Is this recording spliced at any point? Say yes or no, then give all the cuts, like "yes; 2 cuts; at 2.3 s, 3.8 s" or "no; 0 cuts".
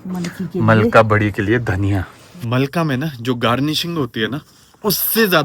no; 0 cuts